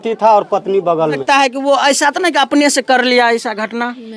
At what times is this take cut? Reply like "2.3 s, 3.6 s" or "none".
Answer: 1.2 s